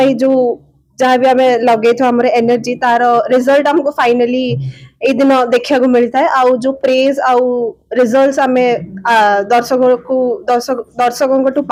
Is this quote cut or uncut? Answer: uncut